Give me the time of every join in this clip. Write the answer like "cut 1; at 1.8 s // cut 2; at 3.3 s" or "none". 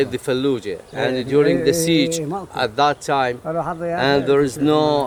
none